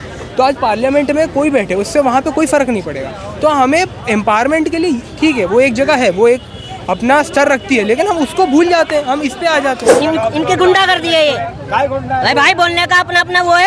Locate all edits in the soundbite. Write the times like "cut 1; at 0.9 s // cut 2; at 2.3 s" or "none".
cut 1; at 9.9 s